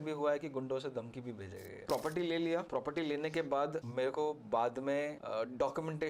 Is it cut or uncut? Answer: cut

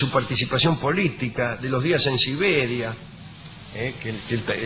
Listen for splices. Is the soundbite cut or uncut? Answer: uncut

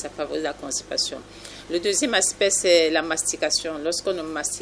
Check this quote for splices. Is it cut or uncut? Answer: uncut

